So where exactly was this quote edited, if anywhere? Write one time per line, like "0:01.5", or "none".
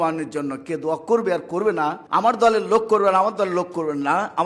0:02.0